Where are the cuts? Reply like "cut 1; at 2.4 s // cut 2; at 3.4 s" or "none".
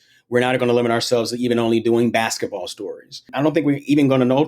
cut 1; at 3.3 s